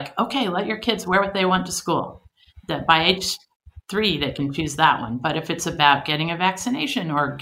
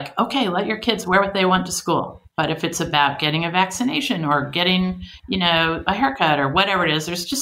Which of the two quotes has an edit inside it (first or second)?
second